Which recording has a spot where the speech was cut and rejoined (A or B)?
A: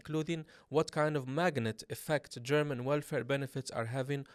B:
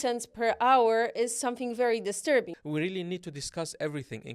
B